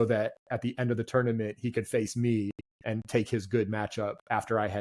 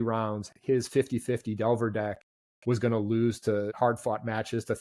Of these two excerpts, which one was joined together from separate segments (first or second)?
second